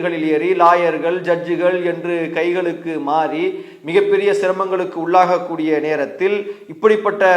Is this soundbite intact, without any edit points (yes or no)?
yes